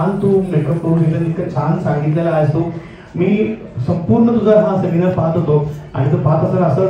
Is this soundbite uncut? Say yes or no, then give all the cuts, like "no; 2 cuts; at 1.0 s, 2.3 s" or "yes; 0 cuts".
yes; 0 cuts